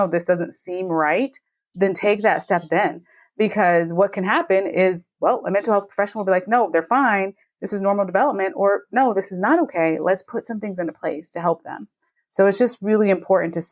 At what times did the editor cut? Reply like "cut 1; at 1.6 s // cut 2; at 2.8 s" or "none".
none